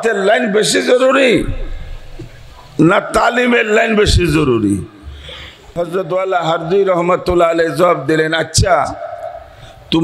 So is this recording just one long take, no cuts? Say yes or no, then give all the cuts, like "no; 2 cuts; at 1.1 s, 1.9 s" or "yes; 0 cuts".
no; 1 cut; at 5.7 s